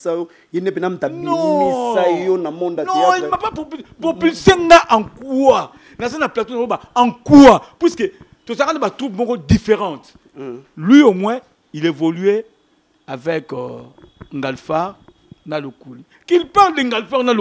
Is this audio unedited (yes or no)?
yes